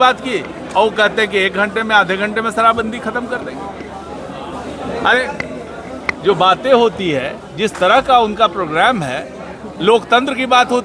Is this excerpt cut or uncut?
uncut